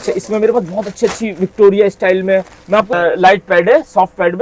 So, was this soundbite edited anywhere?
yes; 1 cut; at 2.9 s

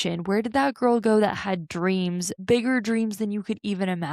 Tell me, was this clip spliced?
yes; 1 cut; at 2.3 s

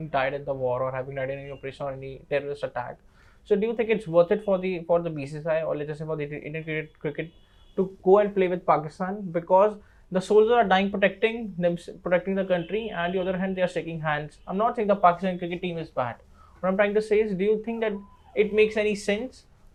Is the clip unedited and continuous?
yes; 0 cuts

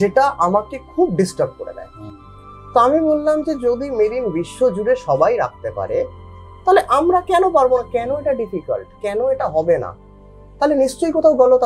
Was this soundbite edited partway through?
no; 0 cuts

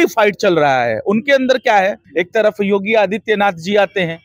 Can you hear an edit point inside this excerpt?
yes; 1 cut; at 2.0 s

